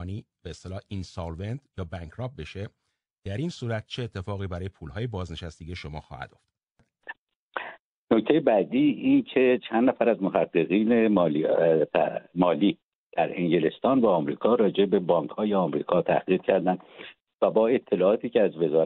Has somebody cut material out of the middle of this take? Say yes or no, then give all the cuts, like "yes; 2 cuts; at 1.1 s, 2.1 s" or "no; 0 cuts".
yes; 1 cut; at 7.1 s